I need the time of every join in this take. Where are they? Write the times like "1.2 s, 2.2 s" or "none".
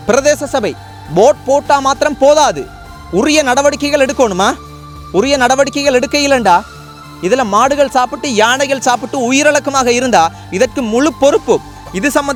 none

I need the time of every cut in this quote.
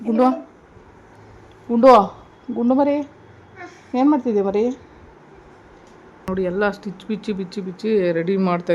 6.3 s

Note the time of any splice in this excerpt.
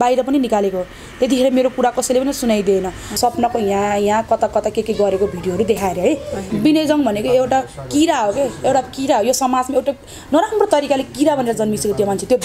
3.1 s, 6.5 s

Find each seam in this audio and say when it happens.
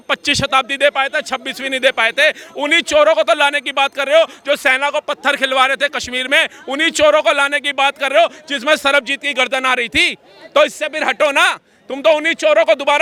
none

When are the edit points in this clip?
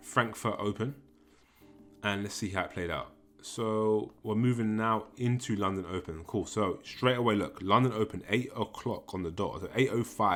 none

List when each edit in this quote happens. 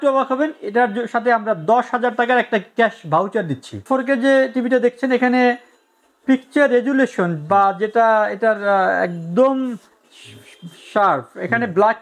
3.8 s

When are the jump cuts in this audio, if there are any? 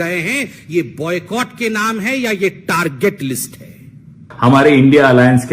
4.3 s

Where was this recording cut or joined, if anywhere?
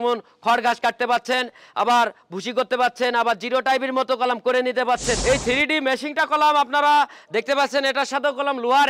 5.2 s

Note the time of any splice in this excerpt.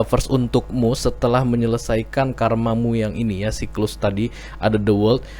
none

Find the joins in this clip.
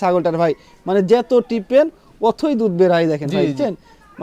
none

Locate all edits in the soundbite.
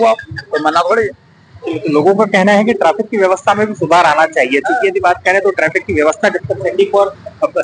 none

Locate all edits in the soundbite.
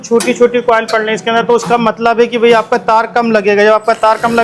none

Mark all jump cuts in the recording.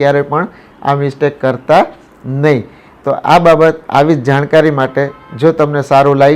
none

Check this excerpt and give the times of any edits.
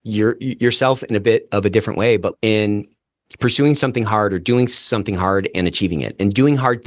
2.3 s

